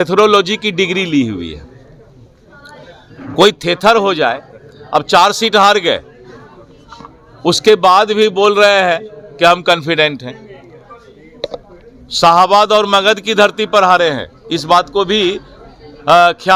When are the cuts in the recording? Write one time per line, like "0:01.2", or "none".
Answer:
none

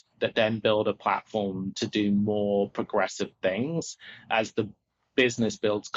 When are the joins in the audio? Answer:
none

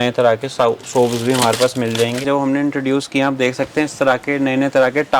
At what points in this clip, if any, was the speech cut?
0:02.2

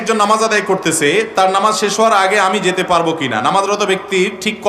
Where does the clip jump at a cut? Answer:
none

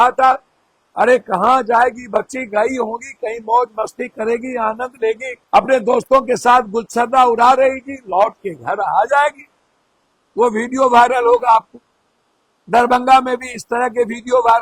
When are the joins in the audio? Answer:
none

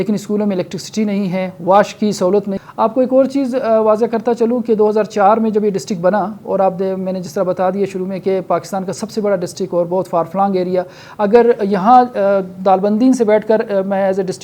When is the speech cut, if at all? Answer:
0:02.6

